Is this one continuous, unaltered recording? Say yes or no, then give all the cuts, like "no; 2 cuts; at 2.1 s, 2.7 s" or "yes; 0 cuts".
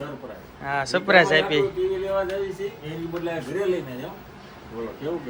yes; 0 cuts